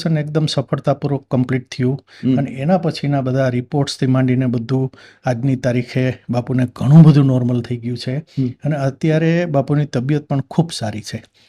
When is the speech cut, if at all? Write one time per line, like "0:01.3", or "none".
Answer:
none